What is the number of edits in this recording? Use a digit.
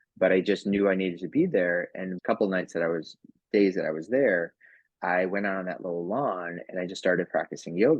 1